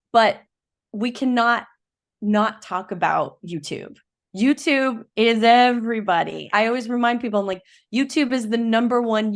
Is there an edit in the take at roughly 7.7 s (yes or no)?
no